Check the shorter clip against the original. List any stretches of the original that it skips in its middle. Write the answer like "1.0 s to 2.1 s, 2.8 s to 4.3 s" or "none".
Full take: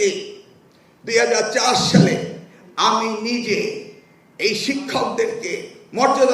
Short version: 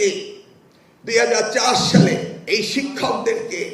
2.3 s to 4.3 s